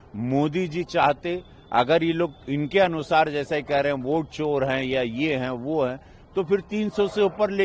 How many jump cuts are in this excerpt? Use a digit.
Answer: 0